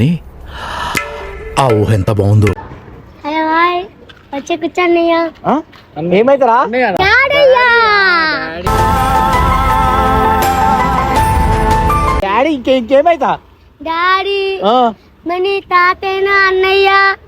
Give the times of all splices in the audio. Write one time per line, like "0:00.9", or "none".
0:02.6